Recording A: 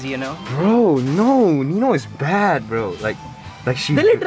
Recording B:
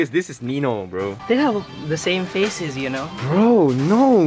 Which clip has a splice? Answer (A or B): B